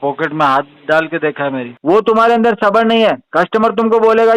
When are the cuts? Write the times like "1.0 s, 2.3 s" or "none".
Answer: 1.7 s